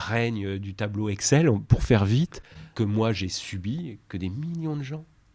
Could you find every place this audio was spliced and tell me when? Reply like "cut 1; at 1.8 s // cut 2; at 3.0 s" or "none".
cut 1; at 2.6 s